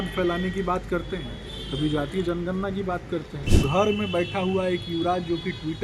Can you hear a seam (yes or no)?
yes